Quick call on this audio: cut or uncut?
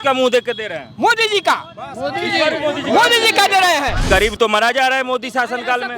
cut